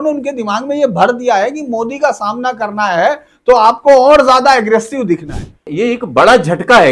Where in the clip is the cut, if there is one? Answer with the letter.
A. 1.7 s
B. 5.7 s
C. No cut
B